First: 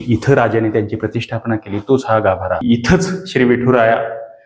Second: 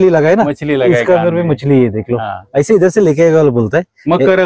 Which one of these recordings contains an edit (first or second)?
first